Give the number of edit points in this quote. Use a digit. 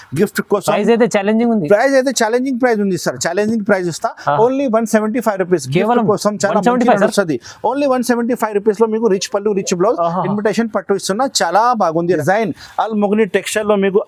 1